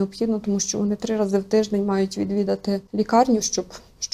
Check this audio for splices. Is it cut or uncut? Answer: cut